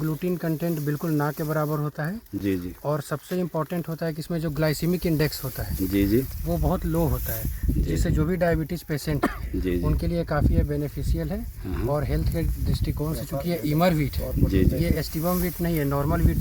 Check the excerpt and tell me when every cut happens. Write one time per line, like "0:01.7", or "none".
none